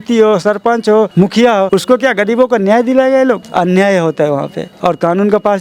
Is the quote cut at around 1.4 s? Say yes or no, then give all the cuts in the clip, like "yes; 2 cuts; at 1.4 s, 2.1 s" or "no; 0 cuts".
yes; 3 cuts; at 1.4 s, 3.4 s, 4.6 s